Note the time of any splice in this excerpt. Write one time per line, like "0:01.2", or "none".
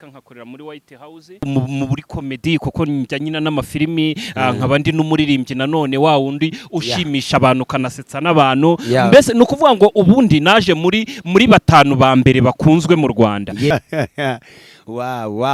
0:01.5
0:13.7